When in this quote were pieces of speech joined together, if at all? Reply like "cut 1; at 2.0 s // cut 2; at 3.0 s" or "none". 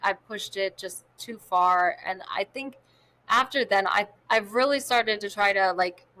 none